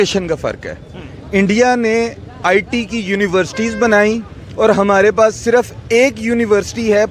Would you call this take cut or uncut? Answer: uncut